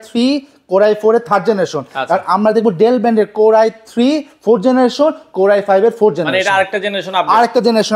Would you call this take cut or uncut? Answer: uncut